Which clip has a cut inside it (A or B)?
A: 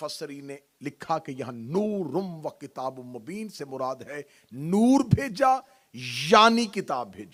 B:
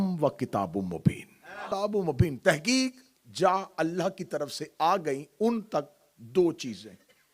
B